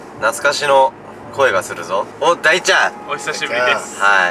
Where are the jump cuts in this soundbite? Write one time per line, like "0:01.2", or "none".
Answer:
none